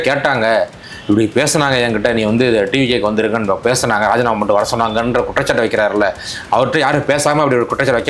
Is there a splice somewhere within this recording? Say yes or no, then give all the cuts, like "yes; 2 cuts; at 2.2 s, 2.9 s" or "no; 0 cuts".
no; 0 cuts